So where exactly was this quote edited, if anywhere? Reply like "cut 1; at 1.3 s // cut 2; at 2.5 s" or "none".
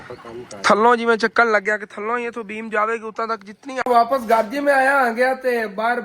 cut 1; at 3.8 s